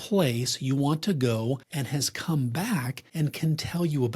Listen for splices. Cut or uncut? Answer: cut